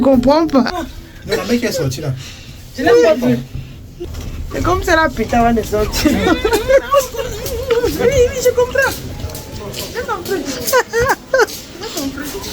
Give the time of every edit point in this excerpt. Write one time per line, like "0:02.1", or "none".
0:04.0